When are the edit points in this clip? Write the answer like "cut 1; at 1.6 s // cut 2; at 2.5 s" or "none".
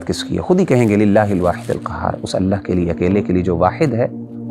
none